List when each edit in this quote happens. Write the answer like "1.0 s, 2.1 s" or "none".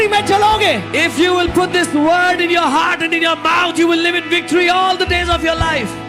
none

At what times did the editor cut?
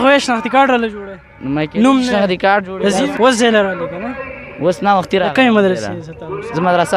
3.1 s

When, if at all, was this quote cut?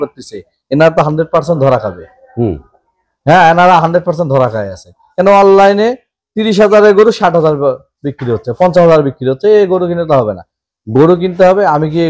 none

